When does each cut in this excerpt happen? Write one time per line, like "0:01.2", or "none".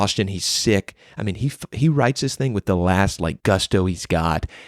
0:03.4